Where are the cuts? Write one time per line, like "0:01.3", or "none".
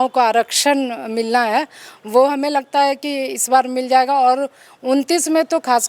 none